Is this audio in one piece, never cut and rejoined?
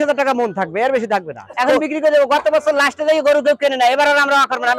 no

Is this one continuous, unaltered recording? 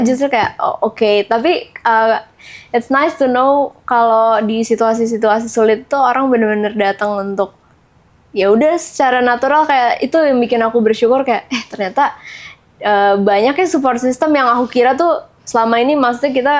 yes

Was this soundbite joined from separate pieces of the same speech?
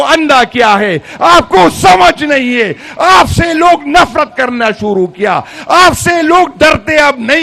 no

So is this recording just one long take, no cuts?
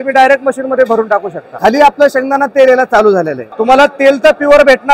no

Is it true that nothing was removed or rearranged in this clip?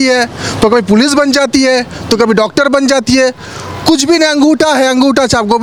yes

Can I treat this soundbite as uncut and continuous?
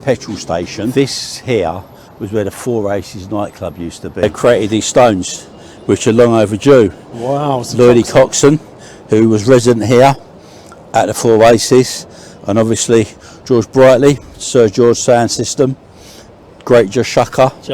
no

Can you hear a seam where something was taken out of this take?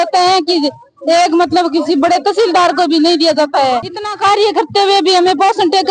no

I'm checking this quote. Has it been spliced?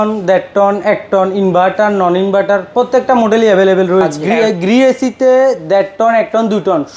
yes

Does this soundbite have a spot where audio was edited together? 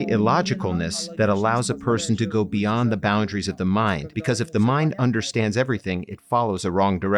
yes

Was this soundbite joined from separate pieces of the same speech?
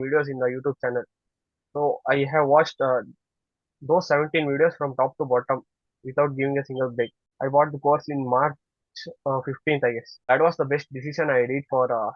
yes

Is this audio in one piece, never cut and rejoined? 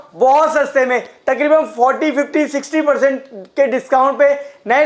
yes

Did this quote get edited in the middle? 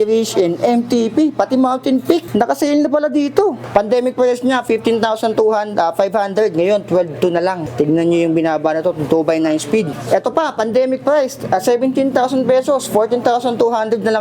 yes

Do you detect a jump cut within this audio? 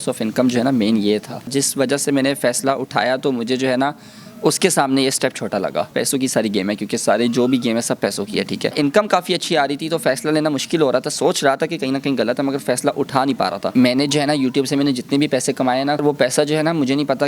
yes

